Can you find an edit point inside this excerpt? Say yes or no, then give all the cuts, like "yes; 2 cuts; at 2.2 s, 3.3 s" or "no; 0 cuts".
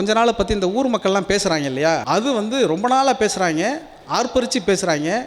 yes; 1 cut; at 2.0 s